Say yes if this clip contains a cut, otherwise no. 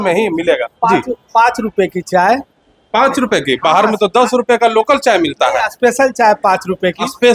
no